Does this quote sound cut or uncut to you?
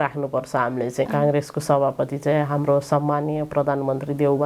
cut